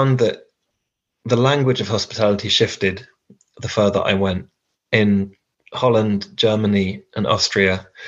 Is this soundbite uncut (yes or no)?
yes